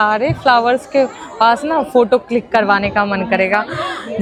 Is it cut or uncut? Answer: uncut